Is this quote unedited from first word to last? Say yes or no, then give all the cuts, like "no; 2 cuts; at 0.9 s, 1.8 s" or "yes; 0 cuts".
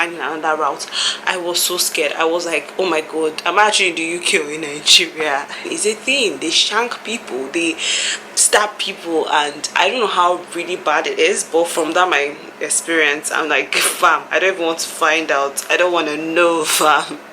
yes; 0 cuts